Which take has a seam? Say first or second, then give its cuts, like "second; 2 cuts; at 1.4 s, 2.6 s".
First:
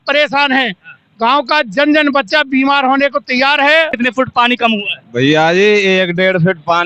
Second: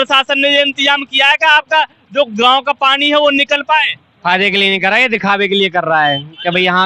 first; 1 cut; at 3.9 s